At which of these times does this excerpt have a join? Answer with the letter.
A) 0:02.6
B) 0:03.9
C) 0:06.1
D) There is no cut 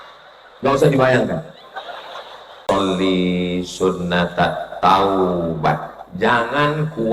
A